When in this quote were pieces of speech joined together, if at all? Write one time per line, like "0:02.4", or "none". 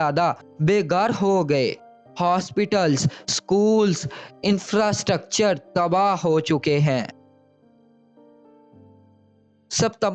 none